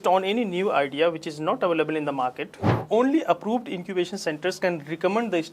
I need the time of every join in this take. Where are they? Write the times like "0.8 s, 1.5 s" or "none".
2.8 s